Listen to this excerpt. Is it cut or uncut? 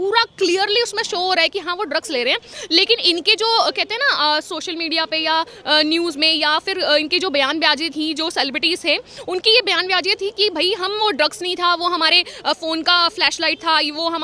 uncut